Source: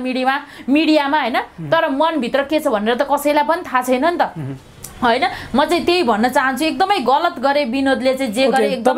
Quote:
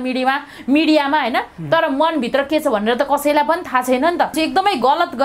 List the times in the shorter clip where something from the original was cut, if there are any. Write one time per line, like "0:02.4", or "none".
0:04.3